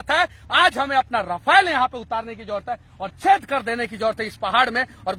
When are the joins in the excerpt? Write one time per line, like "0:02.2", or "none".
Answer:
none